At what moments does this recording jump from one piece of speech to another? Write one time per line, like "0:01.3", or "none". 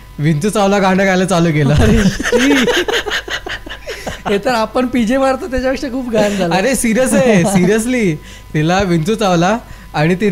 none